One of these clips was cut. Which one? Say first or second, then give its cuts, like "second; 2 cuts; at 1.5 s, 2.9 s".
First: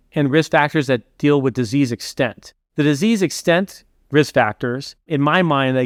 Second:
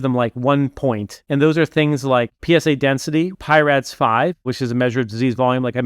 second; 4 cuts; at 1.1 s, 2.3 s, 3.4 s, 4.4 s